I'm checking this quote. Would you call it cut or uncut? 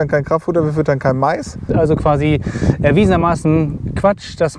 cut